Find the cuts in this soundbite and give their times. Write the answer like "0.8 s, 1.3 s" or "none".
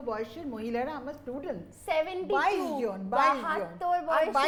none